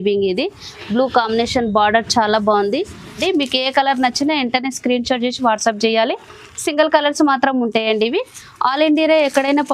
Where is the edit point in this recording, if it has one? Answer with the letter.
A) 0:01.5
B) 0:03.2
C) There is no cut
B